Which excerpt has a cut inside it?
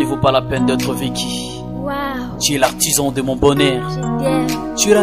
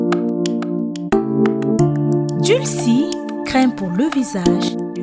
second; 1 cut; at 1.2 s

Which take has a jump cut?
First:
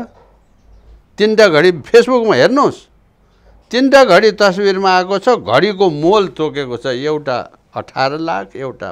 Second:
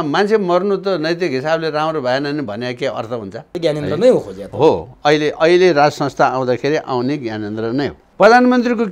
second; 2 cuts; at 3.6 s, 8.0 s

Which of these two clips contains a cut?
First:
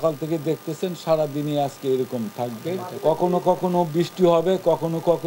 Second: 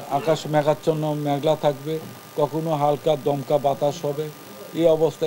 first; 1 cut; at 2.9 s

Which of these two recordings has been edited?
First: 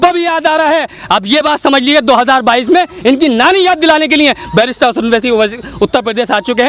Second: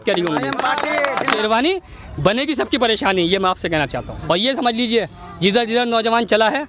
second; 2 cuts; at 1.4 s, 4.1 s

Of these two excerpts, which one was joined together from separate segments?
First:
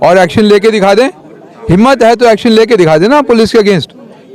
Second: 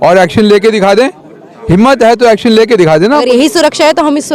second; 1 cut; at 3.2 s

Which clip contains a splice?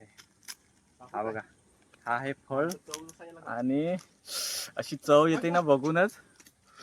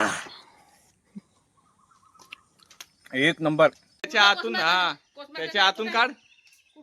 second; 1 cut; at 4.1 s

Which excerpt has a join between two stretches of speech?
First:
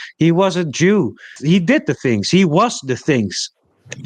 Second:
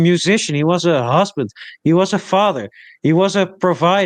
first; 1 cut; at 1.4 s

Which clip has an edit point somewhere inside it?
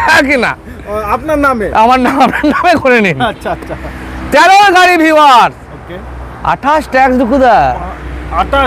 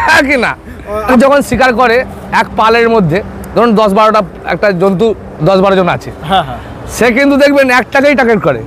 second; 1 cut; at 1.1 s

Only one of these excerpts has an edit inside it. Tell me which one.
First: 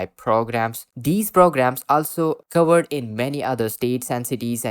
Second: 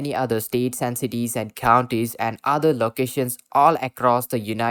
first; 1 cut; at 0.9 s

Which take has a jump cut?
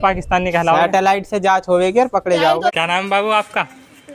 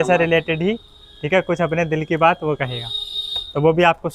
first; 1 cut; at 2.7 s

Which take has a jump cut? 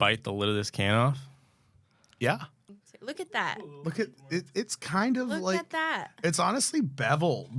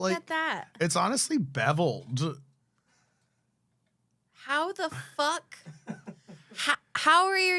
first; 1 cut; at 2.6 s

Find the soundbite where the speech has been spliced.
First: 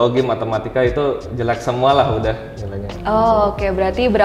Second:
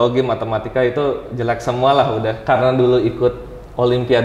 second; 1 cut; at 2.4 s

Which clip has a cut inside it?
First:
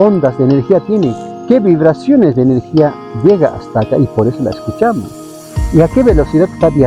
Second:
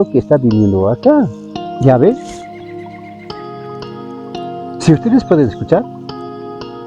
second; 1 cut; at 1.6 s

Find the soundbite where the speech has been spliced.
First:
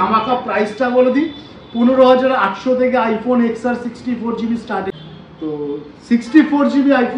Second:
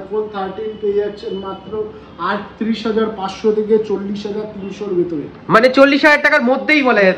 first; 1 cut; at 4.9 s

